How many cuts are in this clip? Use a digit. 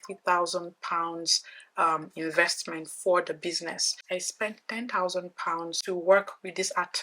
2